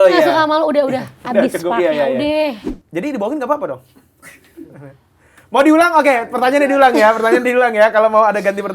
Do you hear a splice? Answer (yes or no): yes